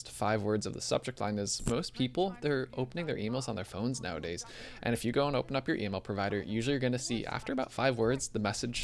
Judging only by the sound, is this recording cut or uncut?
cut